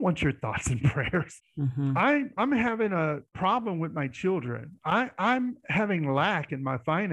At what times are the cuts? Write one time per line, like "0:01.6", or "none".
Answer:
0:01.3
0:03.3